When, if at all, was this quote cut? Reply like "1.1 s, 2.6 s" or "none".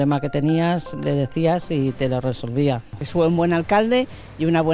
3.0 s